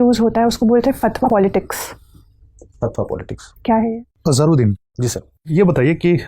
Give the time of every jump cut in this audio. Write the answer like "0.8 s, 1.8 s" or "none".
1.2 s, 3.9 s